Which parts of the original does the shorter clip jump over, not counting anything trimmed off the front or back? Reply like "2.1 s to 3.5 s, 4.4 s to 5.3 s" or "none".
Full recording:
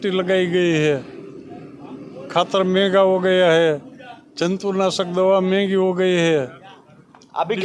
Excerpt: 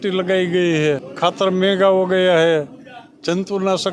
1.1 s to 2.2 s